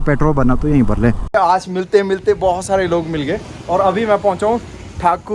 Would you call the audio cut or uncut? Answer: cut